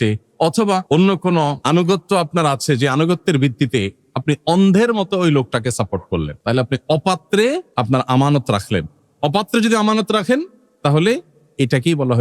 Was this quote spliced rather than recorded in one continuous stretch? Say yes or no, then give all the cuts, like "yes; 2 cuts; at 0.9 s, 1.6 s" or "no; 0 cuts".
yes; 4 cuts; at 0.8 s, 1.6 s, 6.3 s, 7.7 s